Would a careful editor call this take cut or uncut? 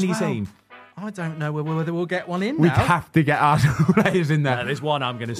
uncut